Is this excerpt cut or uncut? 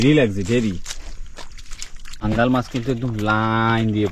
cut